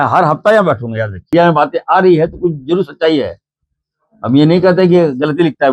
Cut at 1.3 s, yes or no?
yes